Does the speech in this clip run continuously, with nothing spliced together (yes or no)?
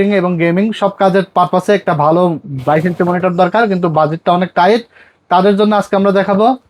yes